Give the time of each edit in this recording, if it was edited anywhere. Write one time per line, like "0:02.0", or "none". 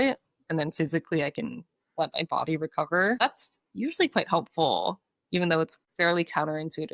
0:03.2
0:05.8